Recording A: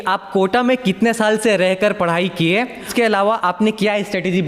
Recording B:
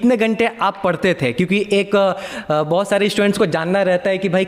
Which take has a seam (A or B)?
A